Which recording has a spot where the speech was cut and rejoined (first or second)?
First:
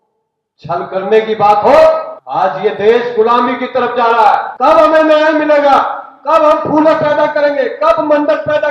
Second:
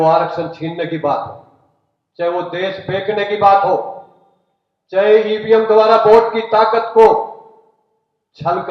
first